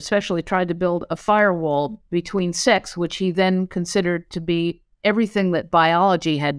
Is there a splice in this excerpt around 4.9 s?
no; 1 cut; at 2.0 s

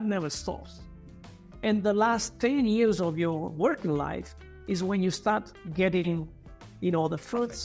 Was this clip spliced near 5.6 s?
yes; 1 cut; at 5.6 s

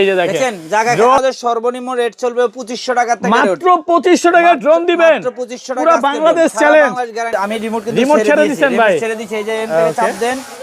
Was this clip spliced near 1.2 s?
yes; 2 cuts; at 1.2 s, 7.3 s

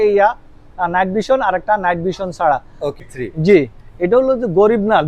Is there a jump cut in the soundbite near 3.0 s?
yes; 1 cut; at 3.0 s

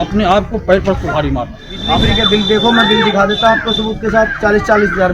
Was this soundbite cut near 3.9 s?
no; 1 cut; at 2.0 s

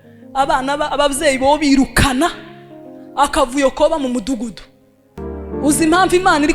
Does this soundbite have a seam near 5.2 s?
yes; 1 cut; at 5.2 s

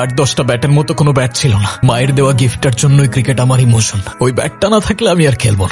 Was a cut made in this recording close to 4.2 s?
no; 1 cut; at 1.7 s

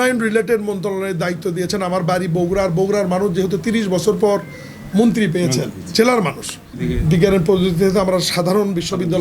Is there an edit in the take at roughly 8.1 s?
no; 1 cut; at 6.7 s

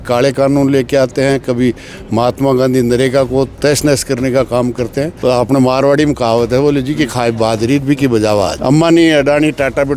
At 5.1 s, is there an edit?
yes; 2 cuts; at 5.1 s, 8.6 s

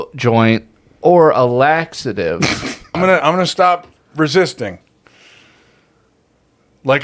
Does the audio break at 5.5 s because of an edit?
no; 1 cut; at 3.0 s

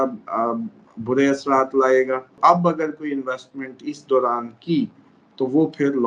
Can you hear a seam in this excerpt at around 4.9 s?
no; 1 cut; at 2.3 s

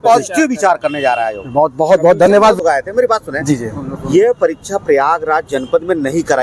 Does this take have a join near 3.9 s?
no; 1 cut; at 2.6 s

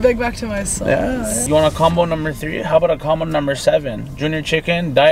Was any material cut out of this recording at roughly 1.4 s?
yes; 1 cut; at 1.4 s

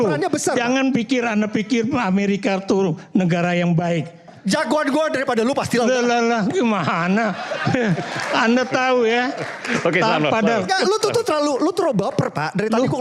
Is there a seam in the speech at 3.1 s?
no; 1 cut; at 4.3 s

